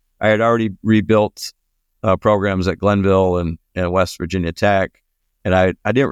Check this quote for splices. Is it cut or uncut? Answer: uncut